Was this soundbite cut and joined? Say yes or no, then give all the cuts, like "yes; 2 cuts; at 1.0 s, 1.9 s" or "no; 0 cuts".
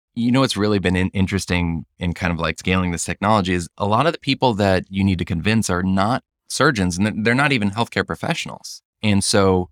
yes; 1 cut; at 6.4 s